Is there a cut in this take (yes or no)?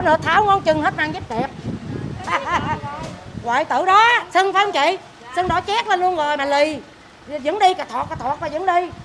no